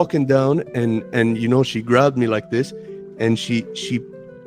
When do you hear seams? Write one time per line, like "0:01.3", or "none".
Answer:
none